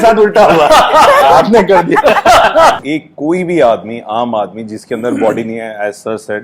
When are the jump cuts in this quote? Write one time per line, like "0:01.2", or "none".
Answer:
0:02.8